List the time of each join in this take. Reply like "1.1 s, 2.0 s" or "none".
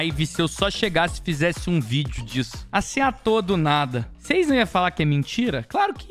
none